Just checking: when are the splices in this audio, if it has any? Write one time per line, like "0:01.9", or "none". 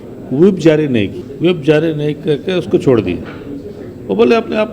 0:01.2